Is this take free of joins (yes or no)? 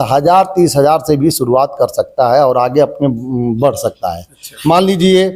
yes